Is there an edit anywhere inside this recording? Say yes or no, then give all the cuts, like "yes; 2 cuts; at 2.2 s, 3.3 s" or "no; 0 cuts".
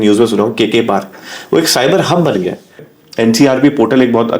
yes; 1 cut; at 2.9 s